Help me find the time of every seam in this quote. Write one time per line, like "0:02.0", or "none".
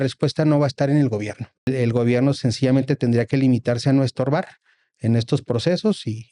0:01.7